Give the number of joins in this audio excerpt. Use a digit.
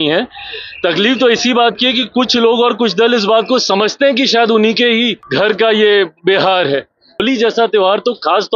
2